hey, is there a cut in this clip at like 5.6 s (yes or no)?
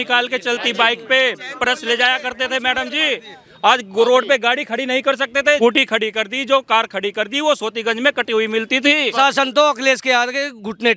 yes